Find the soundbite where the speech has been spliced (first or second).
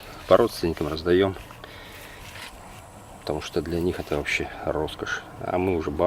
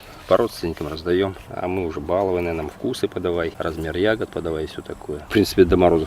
second